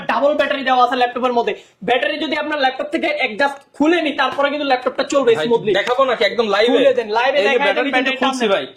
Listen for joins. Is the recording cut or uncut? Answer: uncut